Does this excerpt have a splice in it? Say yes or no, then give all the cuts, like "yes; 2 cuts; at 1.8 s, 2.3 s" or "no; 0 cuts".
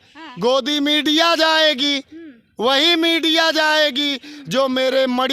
no; 0 cuts